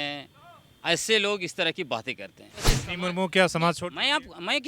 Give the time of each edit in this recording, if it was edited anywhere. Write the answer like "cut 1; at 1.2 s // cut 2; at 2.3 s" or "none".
cut 1; at 2.8 s